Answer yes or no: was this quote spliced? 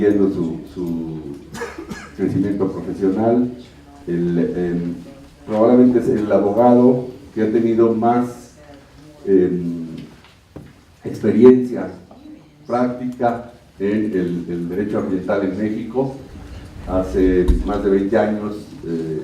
yes